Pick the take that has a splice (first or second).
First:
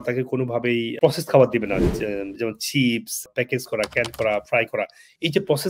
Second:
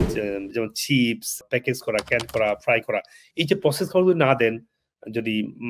first